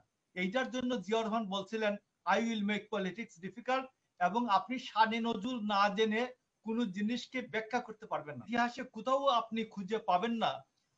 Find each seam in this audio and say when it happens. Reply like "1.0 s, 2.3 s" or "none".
8.4 s